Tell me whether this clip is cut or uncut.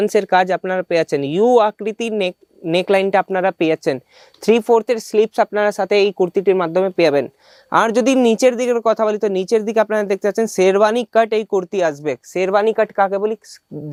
uncut